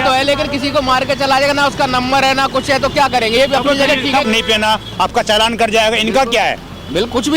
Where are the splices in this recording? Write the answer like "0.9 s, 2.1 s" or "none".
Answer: 4.2 s